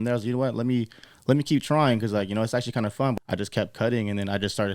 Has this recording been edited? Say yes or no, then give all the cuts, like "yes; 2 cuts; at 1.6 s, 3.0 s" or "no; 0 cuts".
yes; 1 cut; at 3.1 s